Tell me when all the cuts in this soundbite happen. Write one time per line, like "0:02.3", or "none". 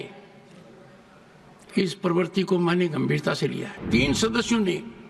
0:03.8